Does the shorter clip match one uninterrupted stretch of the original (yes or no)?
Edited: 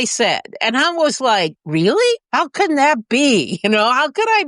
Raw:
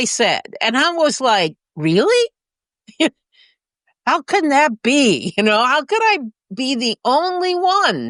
no